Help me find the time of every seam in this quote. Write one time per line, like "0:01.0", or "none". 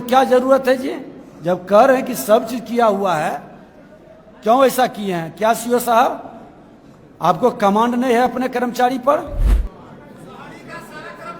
0:09.5